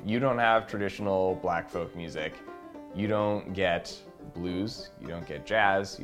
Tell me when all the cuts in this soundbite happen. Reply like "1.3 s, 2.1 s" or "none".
none